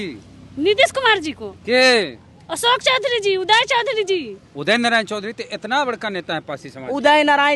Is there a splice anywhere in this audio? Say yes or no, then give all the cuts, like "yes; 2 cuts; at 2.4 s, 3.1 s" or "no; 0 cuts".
yes; 1 cut; at 4.5 s